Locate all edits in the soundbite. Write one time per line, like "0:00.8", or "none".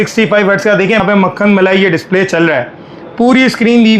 0:01.0